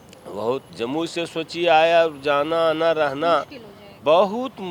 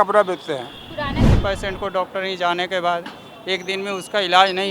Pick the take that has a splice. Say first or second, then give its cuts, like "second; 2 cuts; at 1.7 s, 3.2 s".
second; 1 cut; at 1.4 s